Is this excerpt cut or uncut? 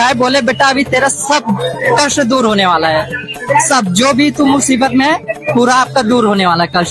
uncut